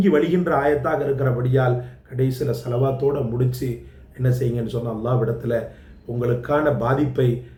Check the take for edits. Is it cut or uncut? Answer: uncut